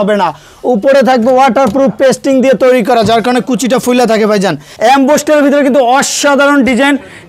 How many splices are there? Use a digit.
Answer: 1